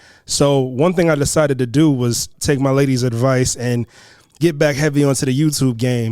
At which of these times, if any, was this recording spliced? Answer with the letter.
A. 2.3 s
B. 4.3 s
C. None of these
A